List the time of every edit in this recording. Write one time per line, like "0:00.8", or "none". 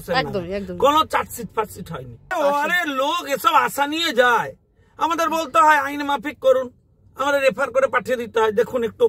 0:02.3